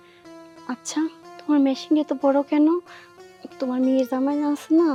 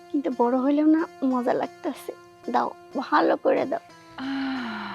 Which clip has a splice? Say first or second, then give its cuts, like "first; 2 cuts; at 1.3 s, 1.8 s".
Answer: second; 1 cut; at 4.0 s